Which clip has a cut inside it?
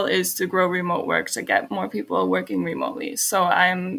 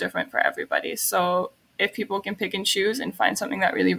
second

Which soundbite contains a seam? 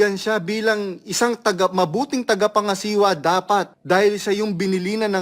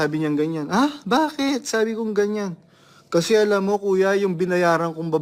first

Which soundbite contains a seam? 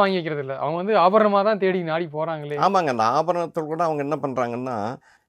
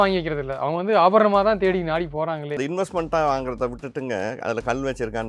second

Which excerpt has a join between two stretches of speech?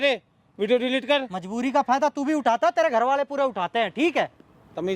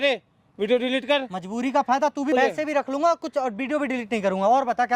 second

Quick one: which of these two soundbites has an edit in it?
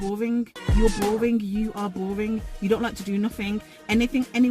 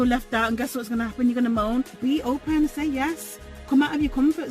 second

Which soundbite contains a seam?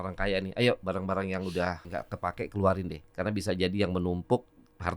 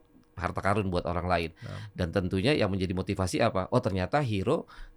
first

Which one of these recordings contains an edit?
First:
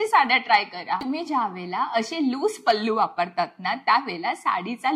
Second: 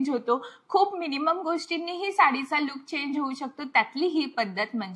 first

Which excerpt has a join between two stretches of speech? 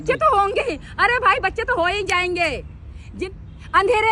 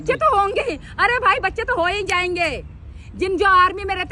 first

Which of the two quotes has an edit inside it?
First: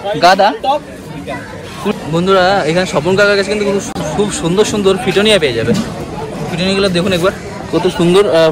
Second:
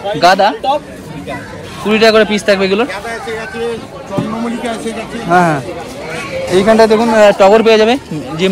first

